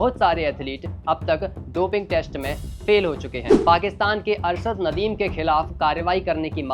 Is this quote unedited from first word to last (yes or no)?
no